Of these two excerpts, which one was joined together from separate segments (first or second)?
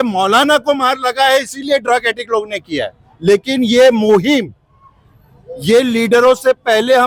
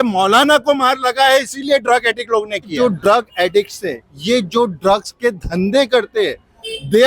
second